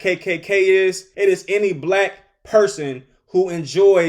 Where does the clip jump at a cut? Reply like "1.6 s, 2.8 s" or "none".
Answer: 1.1 s

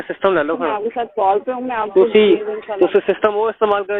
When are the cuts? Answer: none

